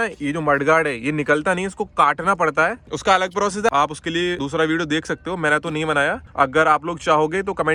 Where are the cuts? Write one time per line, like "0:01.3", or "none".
none